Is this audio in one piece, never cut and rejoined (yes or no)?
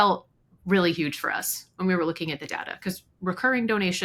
yes